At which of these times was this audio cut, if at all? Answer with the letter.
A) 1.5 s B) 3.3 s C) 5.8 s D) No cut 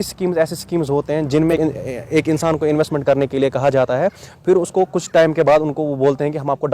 A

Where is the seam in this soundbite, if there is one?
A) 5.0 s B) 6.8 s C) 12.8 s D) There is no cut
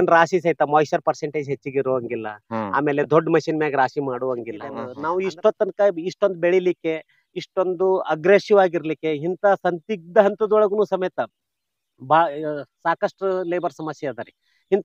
A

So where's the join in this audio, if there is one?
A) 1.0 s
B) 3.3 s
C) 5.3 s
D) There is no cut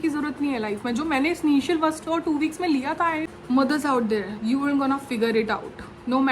B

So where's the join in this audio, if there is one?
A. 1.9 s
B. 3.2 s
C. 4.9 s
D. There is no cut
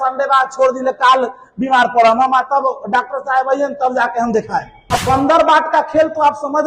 C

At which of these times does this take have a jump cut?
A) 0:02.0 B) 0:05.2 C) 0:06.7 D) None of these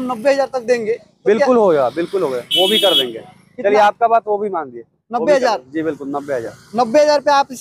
D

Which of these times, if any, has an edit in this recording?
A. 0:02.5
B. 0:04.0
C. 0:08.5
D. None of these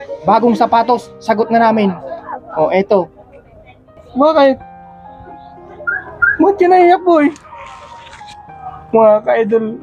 B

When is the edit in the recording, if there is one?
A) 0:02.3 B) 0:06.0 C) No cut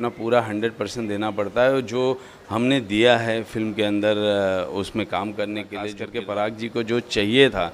B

